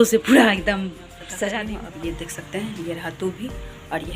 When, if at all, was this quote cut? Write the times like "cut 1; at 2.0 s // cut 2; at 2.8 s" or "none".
cut 1; at 1.6 s